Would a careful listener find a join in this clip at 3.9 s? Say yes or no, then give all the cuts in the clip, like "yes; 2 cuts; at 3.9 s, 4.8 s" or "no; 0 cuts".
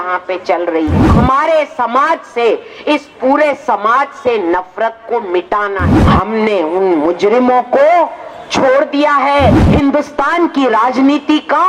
no; 3 cuts; at 1.1 s, 5.9 s, 9.6 s